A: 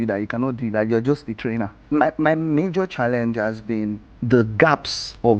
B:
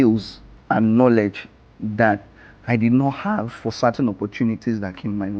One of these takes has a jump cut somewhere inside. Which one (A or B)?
A